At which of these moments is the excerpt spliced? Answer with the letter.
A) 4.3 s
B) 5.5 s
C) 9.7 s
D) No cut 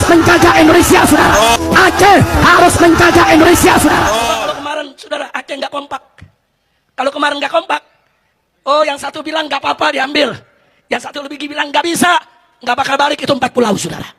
A